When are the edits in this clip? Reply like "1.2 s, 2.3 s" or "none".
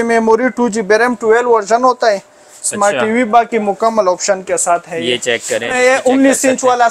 5.7 s